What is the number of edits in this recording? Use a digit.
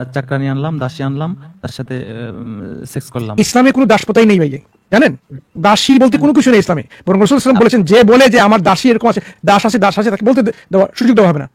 0